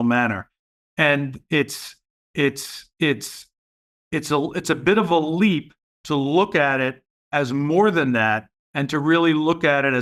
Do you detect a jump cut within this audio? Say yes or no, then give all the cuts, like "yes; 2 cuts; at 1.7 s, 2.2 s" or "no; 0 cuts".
no; 0 cuts